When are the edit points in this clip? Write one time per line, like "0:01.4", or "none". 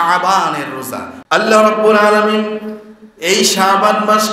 0:01.1